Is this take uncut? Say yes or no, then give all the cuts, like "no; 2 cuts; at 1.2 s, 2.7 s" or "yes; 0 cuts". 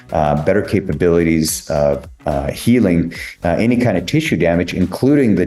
yes; 0 cuts